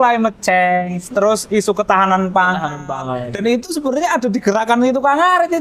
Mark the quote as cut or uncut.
uncut